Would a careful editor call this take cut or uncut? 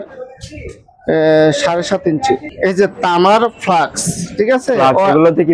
cut